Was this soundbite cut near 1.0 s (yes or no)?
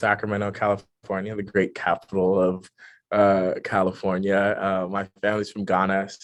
no